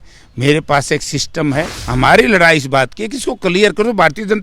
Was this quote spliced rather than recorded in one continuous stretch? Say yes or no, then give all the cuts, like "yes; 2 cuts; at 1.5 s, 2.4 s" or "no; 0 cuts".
yes; 1 cut; at 1.8 s